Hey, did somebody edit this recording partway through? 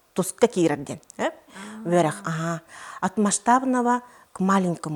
no; 0 cuts

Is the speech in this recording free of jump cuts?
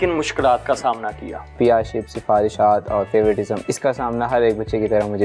no; 2 cuts; at 1.5 s, 3.6 s

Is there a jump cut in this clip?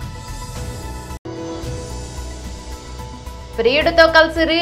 yes; 1 cut; at 3.2 s

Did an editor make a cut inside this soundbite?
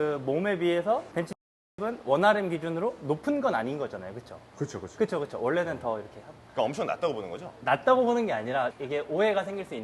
yes; 2 cuts; at 1.7 s, 8.7 s

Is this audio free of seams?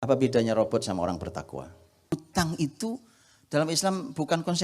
no; 1 cut; at 2.1 s

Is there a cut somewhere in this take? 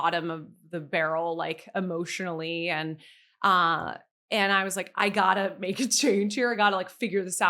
no; 0 cuts

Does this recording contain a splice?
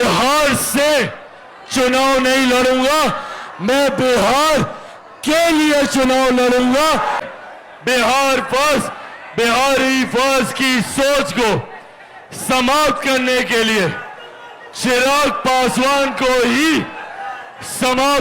yes; 1 cut; at 7.2 s

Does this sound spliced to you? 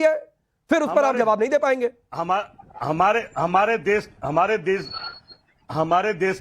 yes; 1 cut; at 4.6 s

